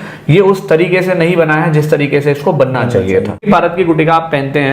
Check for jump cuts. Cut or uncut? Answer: cut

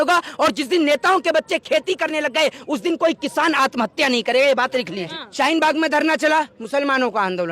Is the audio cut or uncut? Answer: cut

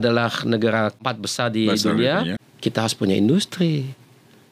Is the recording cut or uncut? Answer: cut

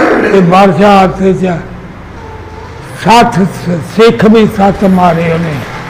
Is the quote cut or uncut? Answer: uncut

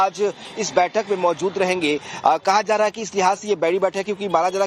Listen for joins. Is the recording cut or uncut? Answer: uncut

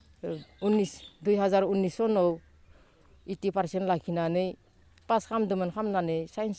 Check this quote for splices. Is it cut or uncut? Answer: uncut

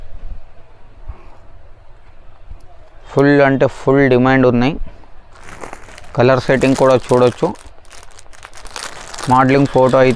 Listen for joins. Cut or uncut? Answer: uncut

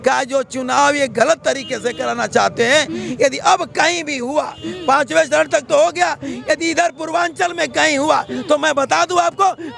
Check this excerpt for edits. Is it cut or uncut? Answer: uncut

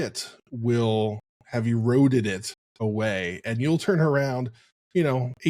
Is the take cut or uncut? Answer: uncut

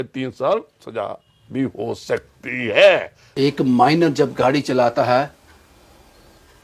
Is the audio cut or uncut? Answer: cut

